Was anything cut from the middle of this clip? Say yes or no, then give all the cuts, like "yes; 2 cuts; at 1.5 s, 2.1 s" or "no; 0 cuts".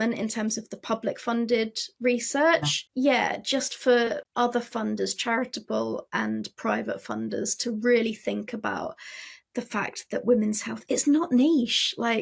yes; 2 cuts; at 2.8 s, 4.2 s